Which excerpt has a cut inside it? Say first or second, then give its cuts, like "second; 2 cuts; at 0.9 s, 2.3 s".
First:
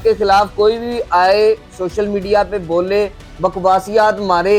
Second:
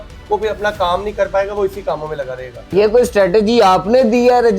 second; 1 cut; at 2.6 s